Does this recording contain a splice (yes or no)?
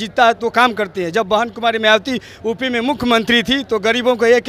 no